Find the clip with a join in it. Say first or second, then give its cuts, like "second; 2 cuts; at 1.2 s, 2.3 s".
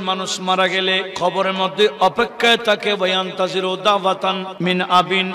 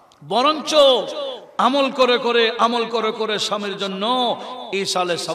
first; 2 cuts; at 1.1 s, 4.5 s